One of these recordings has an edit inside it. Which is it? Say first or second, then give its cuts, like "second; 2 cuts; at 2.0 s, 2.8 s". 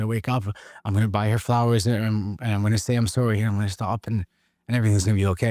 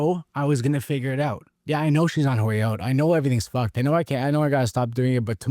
second; 1 cut; at 1.5 s